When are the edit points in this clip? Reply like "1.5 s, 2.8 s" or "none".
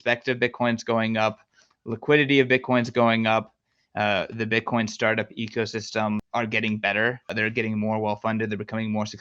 6.2 s, 7.3 s